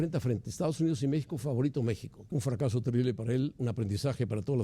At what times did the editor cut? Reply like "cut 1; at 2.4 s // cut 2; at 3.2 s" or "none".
cut 1; at 2.1 s